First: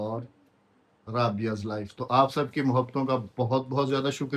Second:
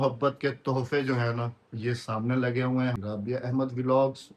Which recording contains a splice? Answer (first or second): second